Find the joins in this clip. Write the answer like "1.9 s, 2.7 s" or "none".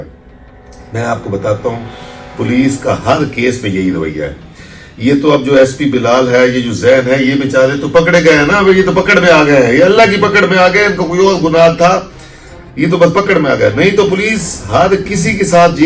none